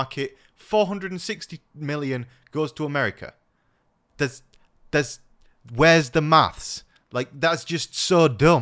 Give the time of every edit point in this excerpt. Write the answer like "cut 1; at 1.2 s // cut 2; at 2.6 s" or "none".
none